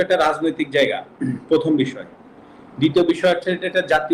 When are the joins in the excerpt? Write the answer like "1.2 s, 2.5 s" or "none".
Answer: none